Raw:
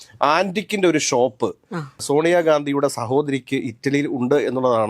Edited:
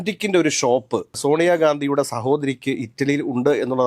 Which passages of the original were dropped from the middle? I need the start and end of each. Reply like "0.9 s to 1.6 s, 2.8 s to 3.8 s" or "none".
1.6 s to 2.0 s